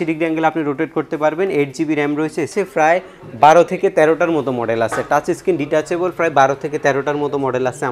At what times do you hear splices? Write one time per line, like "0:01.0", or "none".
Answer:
0:02.5